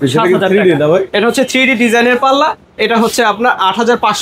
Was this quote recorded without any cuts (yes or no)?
yes